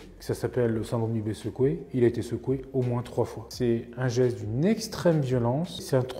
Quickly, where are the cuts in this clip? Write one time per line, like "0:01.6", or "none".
none